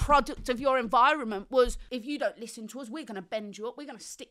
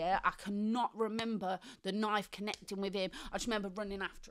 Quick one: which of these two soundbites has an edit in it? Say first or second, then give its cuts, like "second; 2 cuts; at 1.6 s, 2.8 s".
first; 1 cut; at 1.8 s